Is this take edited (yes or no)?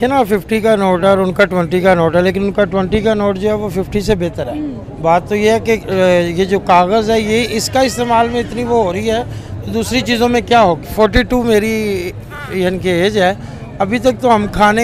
no